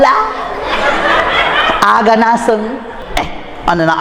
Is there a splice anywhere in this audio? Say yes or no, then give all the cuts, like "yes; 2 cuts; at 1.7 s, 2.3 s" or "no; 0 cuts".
yes; 1 cut; at 3.0 s